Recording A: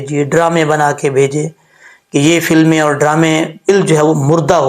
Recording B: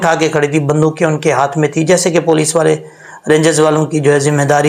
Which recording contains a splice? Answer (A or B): A